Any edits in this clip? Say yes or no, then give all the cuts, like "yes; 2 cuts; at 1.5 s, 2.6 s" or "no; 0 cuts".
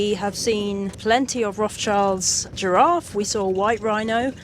yes; 2 cuts; at 0.9 s, 2.5 s